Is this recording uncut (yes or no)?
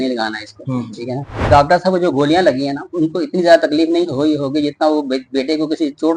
no